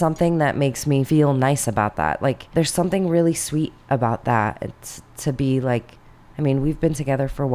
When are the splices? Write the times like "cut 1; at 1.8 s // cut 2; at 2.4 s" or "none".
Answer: cut 1; at 1.1 s // cut 2; at 2.4 s